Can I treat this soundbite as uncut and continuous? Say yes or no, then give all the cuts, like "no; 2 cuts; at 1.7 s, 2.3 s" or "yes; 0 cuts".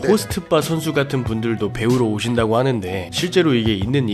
yes; 0 cuts